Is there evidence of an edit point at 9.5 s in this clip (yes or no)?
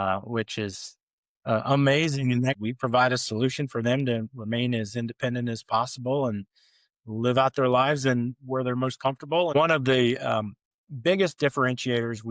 yes